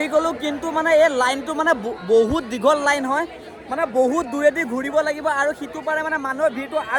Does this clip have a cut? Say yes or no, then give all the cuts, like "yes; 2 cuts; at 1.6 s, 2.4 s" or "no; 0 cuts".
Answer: no; 0 cuts